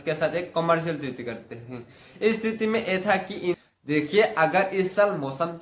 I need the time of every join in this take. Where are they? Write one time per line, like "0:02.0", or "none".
0:03.6